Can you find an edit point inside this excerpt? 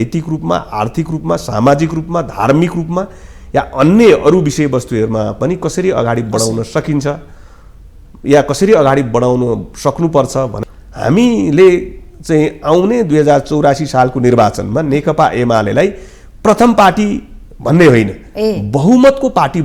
yes; 1 cut; at 10.5 s

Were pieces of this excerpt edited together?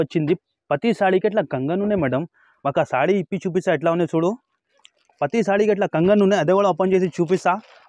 no; 0 cuts

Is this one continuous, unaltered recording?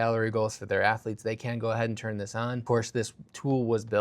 no; 1 cut; at 2.6 s

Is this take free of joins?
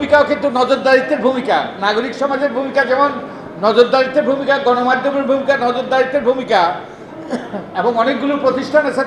yes; 0 cuts

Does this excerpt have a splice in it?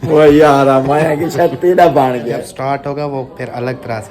yes; 1 cut; at 2.3 s

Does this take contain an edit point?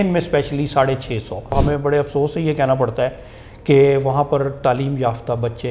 yes; 1 cut; at 1.5 s

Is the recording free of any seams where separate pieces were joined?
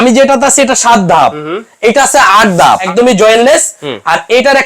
no; 1 cut; at 2.9 s

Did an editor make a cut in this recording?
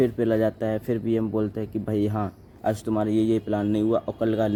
no; 0 cuts

